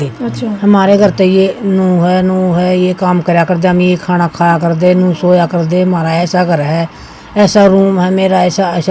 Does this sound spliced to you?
no; 0 cuts

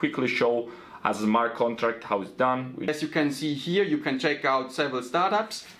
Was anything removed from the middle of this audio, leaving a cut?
yes; 1 cut; at 2.9 s

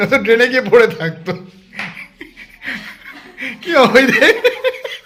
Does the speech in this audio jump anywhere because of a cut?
no; 0 cuts

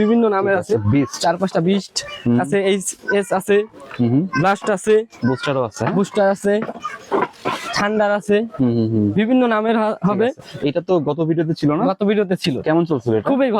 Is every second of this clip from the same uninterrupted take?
yes; 0 cuts

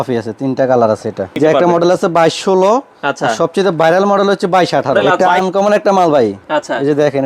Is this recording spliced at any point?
yes; 2 cuts; at 1.3 s, 5.0 s

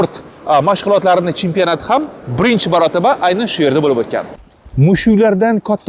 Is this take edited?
yes; 1 cut; at 4.4 s

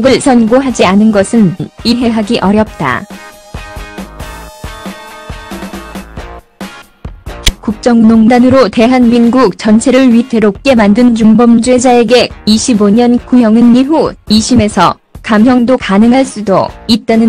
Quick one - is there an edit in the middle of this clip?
yes; 1 cut; at 11.3 s

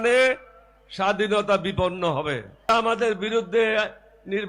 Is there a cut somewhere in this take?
yes; 1 cut; at 2.7 s

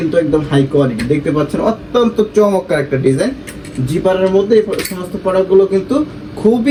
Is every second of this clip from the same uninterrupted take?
yes; 0 cuts

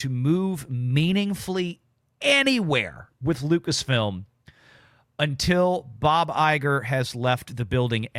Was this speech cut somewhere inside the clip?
no; 0 cuts

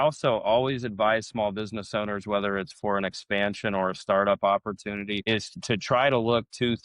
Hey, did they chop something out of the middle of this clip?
yes; 1 cut; at 5.5 s

